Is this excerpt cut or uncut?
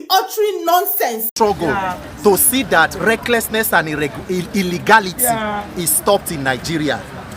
cut